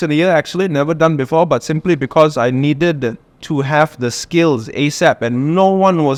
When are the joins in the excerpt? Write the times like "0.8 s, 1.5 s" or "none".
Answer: none